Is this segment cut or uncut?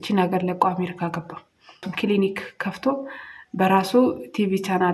cut